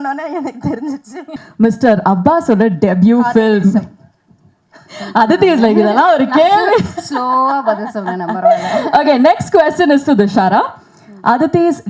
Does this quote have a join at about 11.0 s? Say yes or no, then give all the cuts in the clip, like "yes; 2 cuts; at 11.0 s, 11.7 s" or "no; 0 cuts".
no; 1 cut; at 1.4 s